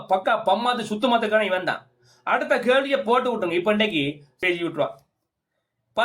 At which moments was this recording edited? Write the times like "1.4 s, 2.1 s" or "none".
4.4 s